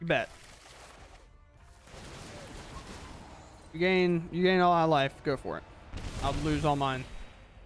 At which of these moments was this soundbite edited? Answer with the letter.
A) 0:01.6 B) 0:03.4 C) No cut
A